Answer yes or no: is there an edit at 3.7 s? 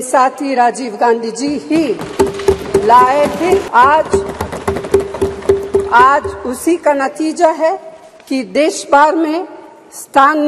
yes